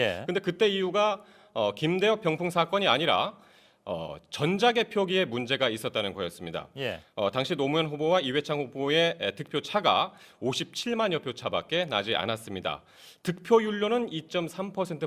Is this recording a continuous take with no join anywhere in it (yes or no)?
yes